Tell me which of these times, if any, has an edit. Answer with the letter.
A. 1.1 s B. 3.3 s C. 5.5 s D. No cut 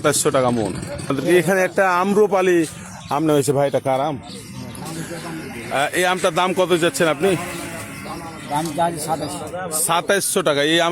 A